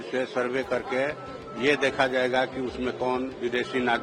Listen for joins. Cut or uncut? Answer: uncut